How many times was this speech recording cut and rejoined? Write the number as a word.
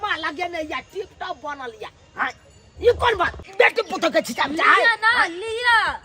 one